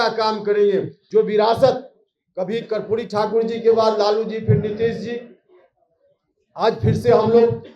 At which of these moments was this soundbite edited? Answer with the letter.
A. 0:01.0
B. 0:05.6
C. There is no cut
A